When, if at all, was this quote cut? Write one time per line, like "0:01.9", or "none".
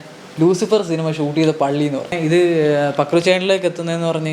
0:02.1